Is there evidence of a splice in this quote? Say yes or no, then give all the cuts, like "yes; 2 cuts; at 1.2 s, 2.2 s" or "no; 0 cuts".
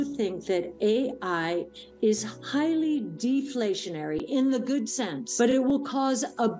yes; 1 cut; at 5.4 s